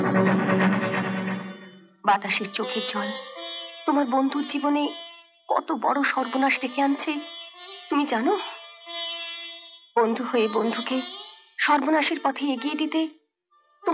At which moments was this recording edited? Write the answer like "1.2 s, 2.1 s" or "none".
none